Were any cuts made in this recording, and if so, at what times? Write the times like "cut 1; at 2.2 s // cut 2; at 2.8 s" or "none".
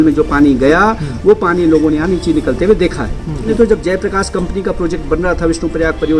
cut 1; at 3.5 s